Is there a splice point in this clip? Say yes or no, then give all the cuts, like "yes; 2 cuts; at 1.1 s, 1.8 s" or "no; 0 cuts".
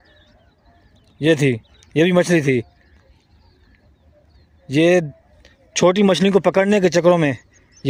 no; 0 cuts